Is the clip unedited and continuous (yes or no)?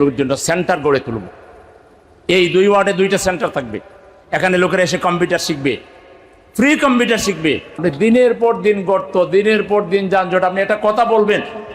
no